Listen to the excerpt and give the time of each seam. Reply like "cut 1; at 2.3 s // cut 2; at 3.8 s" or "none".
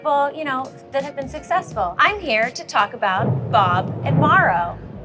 cut 1; at 1.9 s